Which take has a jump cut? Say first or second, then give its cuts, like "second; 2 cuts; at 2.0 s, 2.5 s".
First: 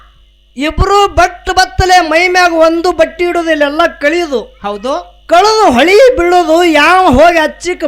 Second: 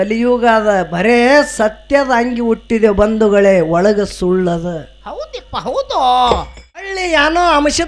second; 1 cut; at 7.0 s